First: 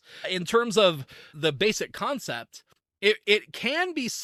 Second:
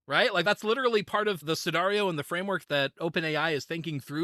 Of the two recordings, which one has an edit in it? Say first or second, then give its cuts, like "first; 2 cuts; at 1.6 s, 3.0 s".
second; 1 cut; at 1.4 s